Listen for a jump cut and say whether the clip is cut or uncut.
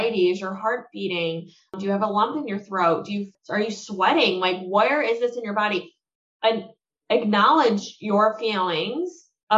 cut